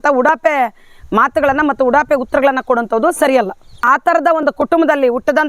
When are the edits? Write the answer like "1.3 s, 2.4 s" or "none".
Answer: 3.8 s